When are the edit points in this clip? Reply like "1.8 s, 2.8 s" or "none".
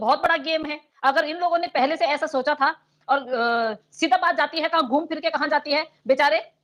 none